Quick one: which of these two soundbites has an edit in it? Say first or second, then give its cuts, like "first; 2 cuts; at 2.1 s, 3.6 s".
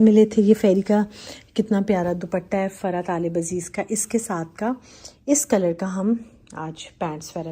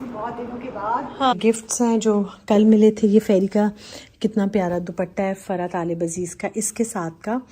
second; 1 cut; at 1.3 s